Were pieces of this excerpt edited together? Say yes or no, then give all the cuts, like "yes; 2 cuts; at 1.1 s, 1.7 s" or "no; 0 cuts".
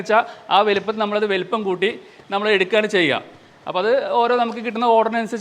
no; 0 cuts